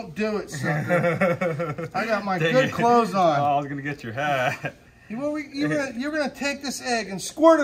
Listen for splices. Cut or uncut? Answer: uncut